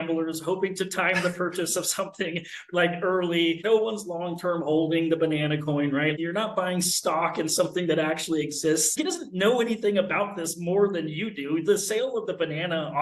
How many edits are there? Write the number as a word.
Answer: three